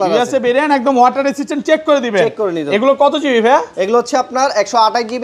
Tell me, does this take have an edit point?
no; 0 cuts

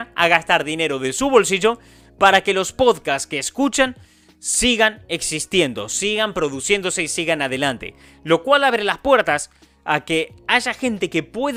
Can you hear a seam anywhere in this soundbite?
no; 0 cuts

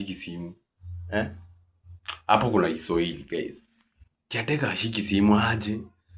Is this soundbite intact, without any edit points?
yes; 0 cuts

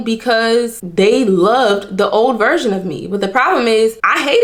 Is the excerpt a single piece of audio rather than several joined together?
yes; 0 cuts

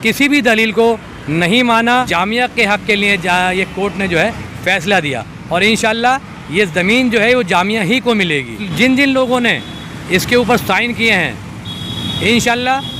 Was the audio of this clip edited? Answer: yes; 2 cuts; at 2.1 s, 8.6 s

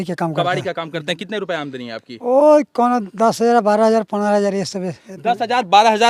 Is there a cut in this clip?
no; 0 cuts

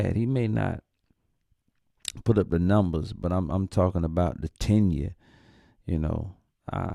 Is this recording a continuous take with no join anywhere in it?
yes; 0 cuts

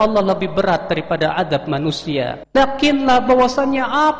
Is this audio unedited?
no; 1 cut; at 2.4 s

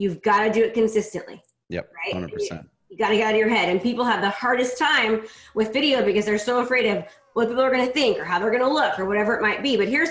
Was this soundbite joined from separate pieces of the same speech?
no; 0 cuts

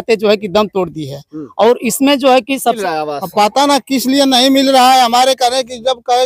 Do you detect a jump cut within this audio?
yes; 1 cut; at 2.8 s

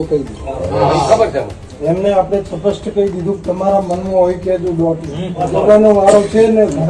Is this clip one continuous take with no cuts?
no; 2 cuts; at 1.6 s, 5.4 s

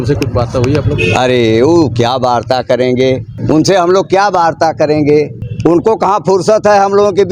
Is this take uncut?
no; 2 cuts; at 3.3 s, 5.4 s

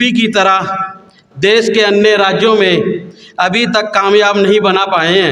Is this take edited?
no; 0 cuts

